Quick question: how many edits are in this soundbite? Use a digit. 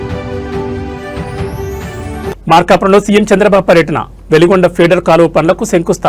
0